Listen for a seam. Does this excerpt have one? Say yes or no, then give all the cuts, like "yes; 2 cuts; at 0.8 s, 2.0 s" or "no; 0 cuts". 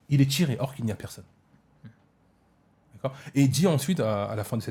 no; 0 cuts